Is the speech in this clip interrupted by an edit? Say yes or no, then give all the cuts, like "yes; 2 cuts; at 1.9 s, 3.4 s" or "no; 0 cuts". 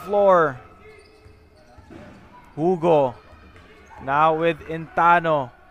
no; 0 cuts